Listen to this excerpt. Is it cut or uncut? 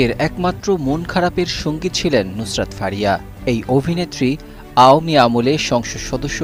uncut